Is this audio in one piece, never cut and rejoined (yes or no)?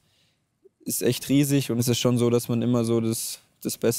no